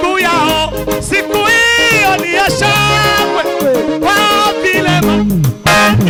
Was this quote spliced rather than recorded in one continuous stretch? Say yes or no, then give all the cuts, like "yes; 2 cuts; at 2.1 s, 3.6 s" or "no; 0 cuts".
no; 0 cuts